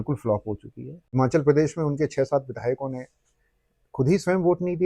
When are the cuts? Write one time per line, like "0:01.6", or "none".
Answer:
0:00.9